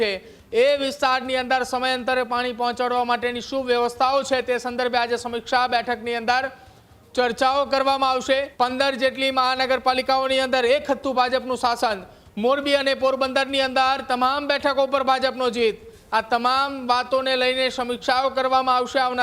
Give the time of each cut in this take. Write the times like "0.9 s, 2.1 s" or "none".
8.5 s